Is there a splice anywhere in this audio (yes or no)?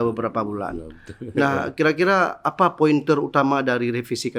no